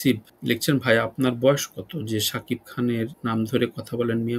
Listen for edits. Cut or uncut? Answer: uncut